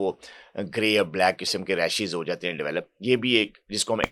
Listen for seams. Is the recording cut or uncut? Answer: uncut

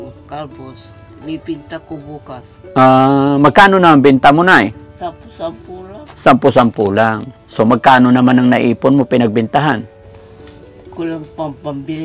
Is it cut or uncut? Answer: uncut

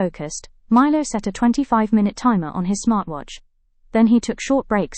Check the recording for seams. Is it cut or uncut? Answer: uncut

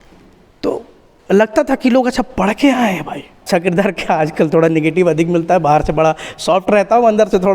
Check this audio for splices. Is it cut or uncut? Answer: cut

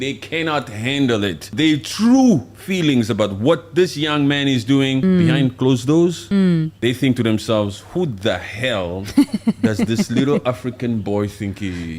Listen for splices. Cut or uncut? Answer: cut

